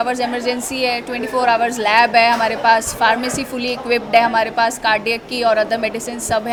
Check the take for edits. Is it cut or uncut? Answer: uncut